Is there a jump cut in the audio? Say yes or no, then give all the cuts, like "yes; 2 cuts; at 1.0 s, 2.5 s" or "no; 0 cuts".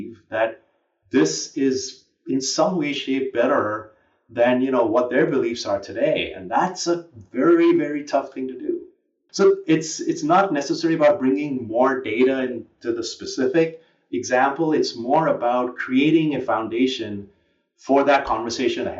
yes; 1 cut; at 9.2 s